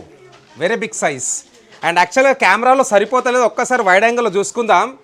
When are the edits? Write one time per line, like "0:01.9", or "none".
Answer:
none